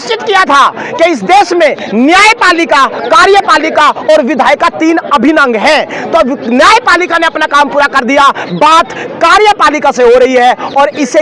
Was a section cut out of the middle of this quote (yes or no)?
no